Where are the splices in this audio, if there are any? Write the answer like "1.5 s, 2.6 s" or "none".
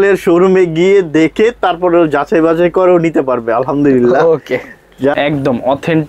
5.1 s